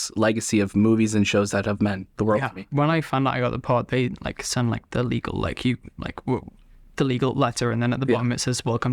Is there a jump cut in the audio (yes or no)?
yes